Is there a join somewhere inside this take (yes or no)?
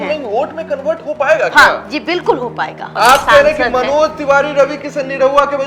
yes